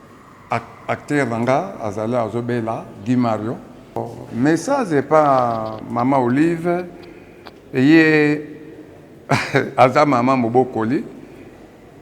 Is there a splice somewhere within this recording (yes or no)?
yes